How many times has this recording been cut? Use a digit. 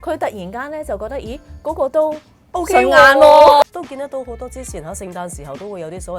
1